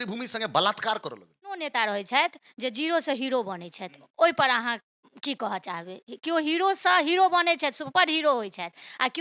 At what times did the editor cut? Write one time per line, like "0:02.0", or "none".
0:01.7